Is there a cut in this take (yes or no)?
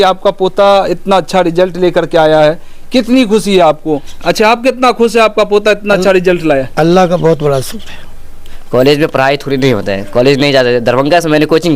yes